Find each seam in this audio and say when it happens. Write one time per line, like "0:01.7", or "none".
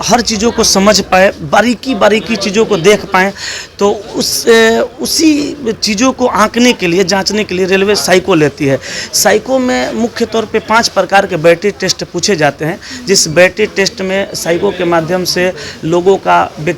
none